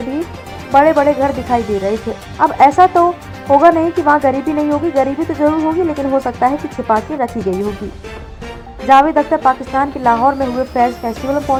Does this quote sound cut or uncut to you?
uncut